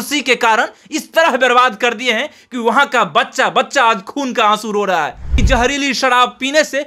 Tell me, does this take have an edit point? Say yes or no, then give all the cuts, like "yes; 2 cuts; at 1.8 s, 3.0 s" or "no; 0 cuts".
yes; 1 cut; at 5.3 s